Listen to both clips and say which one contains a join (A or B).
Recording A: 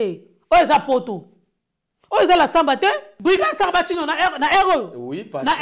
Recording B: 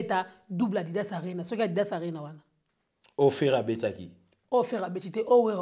A